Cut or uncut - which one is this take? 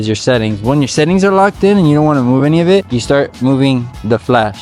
cut